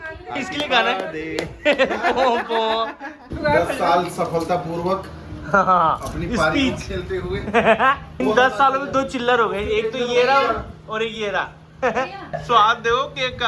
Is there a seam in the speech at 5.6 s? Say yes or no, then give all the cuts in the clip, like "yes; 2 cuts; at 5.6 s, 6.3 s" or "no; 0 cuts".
no; 3 cuts; at 3.1 s, 8.2 s, 12.3 s